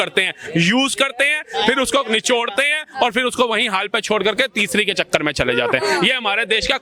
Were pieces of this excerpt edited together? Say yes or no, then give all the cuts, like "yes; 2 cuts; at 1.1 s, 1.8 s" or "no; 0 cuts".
no; 0 cuts